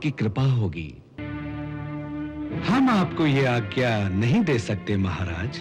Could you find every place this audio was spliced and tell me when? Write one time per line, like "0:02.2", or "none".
0:01.2